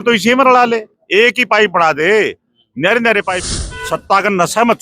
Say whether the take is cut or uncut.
cut